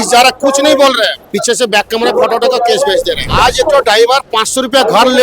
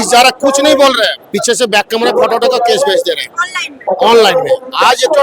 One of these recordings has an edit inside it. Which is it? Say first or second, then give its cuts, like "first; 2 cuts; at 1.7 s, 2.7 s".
first; 1 cut; at 3.3 s